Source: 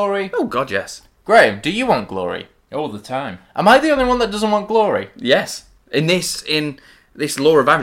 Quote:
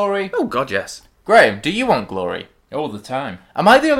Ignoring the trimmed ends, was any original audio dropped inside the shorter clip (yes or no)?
no